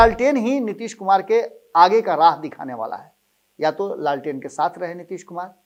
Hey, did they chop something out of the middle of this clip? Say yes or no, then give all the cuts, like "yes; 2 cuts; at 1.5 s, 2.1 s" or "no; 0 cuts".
no; 0 cuts